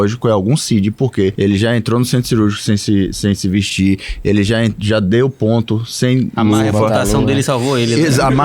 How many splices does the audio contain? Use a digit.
1